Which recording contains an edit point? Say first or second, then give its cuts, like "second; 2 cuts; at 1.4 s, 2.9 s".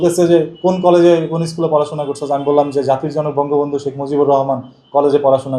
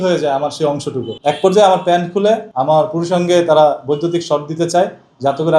second; 2 cuts; at 1.1 s, 2.5 s